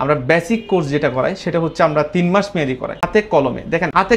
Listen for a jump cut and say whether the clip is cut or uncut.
cut